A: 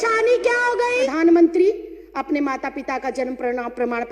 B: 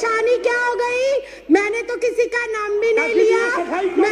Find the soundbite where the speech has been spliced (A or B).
A